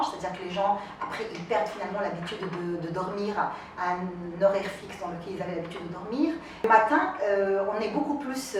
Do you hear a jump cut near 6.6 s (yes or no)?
yes